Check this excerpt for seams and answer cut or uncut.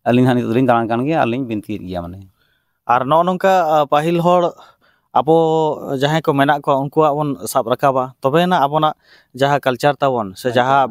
uncut